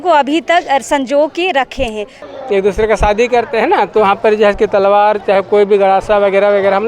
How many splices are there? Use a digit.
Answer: 1